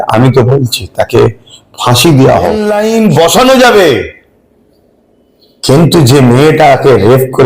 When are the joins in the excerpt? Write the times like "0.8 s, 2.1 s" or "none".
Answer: 2.6 s